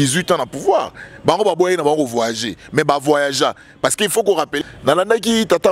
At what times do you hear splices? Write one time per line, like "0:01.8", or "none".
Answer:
0:04.5